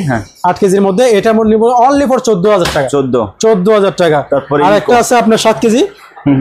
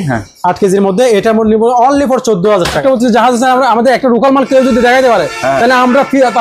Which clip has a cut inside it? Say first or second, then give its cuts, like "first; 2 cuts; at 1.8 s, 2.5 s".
second; 1 cut; at 2.8 s